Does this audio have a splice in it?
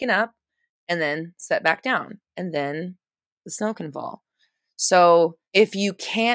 yes; 2 cuts; at 2.3 s, 5.4 s

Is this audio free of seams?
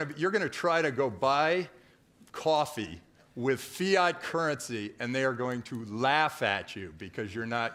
yes; 0 cuts

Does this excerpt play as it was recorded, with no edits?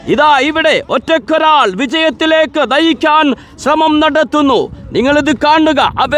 yes; 0 cuts

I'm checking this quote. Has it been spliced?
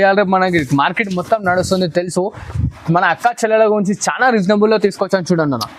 no; 0 cuts

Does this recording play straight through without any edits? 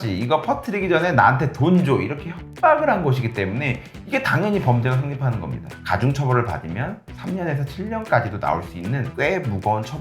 no; 1 cut; at 5.8 s

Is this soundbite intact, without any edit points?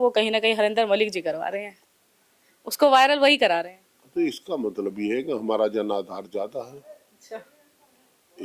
yes; 0 cuts

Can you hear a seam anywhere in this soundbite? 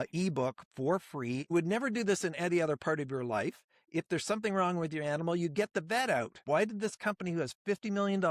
yes; 2 cuts; at 1.5 s, 6.4 s

